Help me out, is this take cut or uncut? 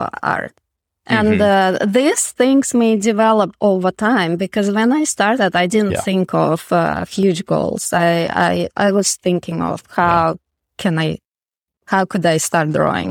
uncut